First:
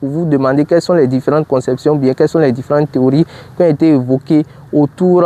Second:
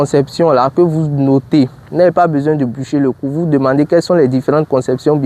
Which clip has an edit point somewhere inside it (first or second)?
second